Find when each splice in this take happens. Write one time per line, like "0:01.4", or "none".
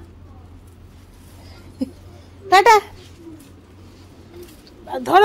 none